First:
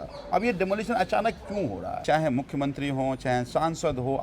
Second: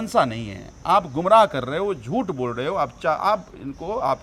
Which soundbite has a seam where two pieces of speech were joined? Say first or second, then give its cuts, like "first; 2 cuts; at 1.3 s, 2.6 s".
first; 1 cut; at 2.0 s